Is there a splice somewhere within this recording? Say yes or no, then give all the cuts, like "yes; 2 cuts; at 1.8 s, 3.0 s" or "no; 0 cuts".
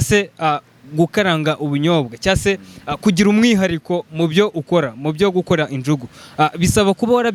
no; 0 cuts